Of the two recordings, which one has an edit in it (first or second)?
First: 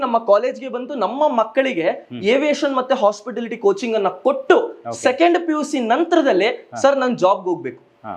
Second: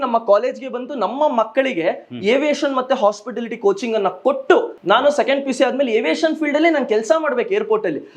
second